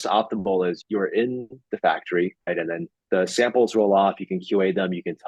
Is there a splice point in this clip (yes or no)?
yes